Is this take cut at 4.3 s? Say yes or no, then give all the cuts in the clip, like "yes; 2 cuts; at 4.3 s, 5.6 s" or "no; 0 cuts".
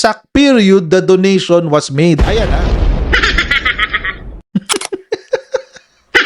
yes; 1 cut; at 4.3 s